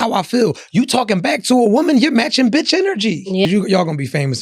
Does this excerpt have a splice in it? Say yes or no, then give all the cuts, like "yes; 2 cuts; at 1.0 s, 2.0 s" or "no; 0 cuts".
yes; 1 cut; at 3.4 s